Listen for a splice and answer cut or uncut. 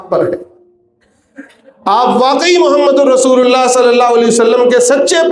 uncut